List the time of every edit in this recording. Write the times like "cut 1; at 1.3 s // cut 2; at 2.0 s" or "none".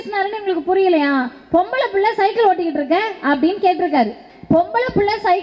cut 1; at 4.3 s

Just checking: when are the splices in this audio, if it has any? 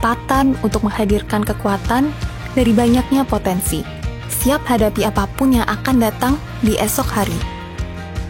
none

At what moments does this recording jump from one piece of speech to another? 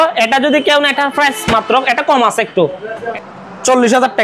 cut 1; at 3.0 s

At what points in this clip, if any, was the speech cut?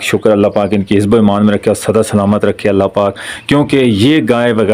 none

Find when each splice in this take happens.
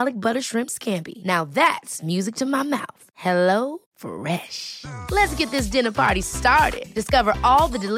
none

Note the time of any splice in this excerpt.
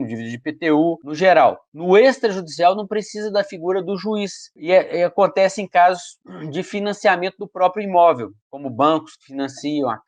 cut 1; at 1.7 s

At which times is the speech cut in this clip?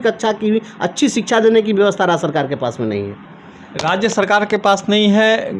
none

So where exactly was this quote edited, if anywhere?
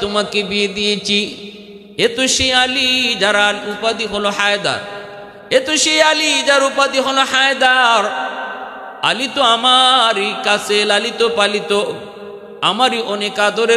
none

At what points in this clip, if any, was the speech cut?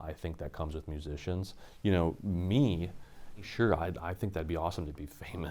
cut 1; at 3.5 s

